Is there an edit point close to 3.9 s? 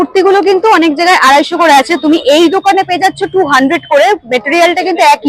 no; 0 cuts

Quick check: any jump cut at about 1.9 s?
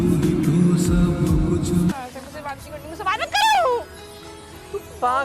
yes; 1 cut; at 1.9 s

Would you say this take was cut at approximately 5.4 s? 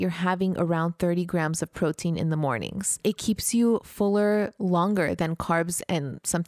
no; 1 cut; at 3.0 s

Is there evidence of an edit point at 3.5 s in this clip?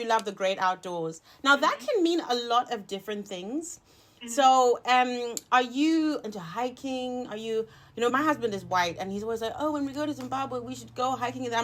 no; 2 cuts; at 6.2 s, 8.1 s

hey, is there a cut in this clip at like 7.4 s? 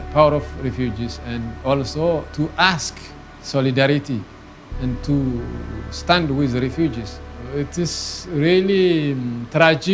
yes; 1 cut; at 7.4 s

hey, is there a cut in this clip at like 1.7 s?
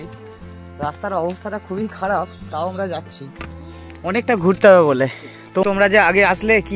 no; 1 cut; at 5.6 s

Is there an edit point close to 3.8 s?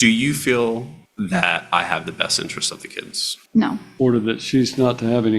yes; 2 cuts; at 1.0 s, 3.8 s

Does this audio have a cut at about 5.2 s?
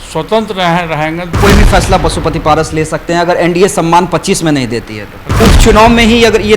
yes; 2 cuts; at 1.3 s, 5.2 s

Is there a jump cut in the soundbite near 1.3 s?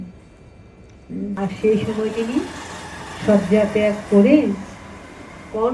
yes; 1 cut; at 1.3 s

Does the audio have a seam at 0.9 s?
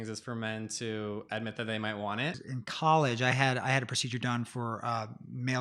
no; 1 cut; at 2.5 s

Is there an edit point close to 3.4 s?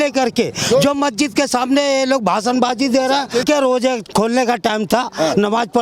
yes; 1 cut; at 3.4 s

